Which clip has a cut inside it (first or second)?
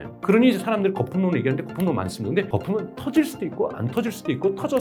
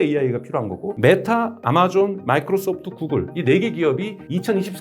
second